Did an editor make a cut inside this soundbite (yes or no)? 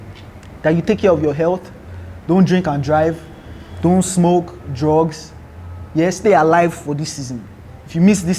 no